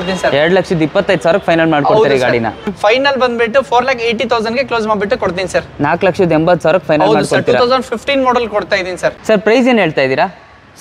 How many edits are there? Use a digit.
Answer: 2